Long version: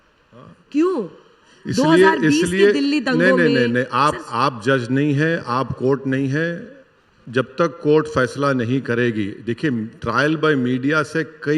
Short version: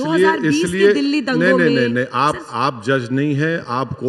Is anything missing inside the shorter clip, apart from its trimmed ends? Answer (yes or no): no